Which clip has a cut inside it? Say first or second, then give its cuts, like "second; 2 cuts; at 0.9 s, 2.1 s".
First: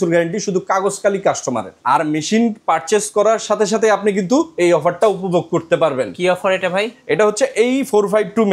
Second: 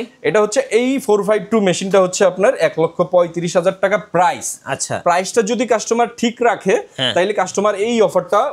first; 1 cut; at 1.8 s